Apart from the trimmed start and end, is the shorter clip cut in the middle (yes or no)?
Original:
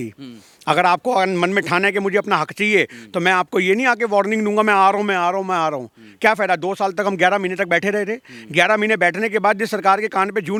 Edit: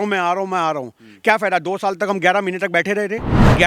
no